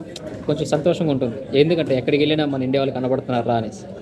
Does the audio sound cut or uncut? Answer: uncut